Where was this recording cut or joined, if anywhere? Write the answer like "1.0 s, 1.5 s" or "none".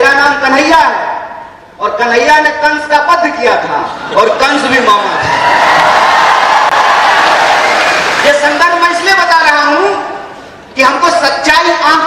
none